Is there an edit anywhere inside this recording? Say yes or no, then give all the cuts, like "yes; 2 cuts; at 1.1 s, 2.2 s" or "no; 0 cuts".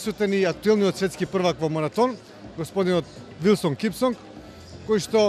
no; 0 cuts